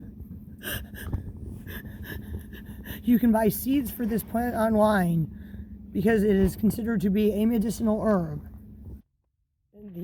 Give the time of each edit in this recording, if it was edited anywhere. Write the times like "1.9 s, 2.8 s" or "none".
9.0 s